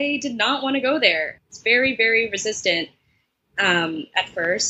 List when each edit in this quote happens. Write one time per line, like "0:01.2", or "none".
0:01.3